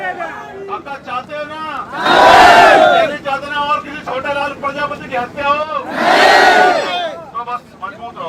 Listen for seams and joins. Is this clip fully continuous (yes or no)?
yes